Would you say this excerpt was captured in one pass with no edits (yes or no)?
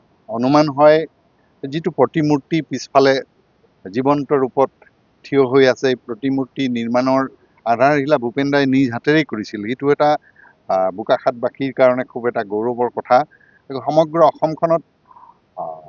yes